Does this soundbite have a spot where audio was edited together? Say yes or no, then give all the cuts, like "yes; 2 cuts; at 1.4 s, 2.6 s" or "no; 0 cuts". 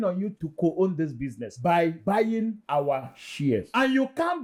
no; 0 cuts